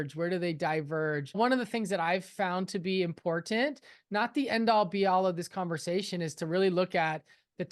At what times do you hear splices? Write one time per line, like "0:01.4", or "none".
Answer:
0:01.4